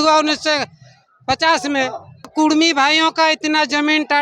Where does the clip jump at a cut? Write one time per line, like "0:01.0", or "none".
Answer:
0:02.3